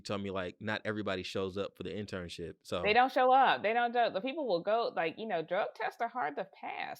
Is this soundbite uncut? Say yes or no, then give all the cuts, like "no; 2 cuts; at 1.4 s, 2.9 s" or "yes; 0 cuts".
yes; 0 cuts